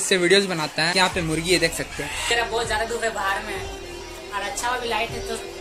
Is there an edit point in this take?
yes; 2 cuts; at 0.9 s, 2.3 s

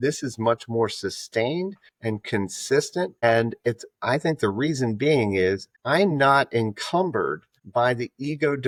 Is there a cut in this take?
no; 0 cuts

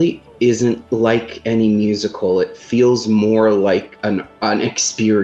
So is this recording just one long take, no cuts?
no; 2 cuts; at 0.8 s, 3.9 s

